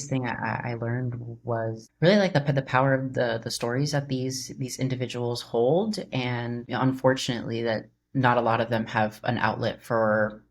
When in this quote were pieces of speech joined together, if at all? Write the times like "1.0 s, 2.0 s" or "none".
1.9 s, 6.7 s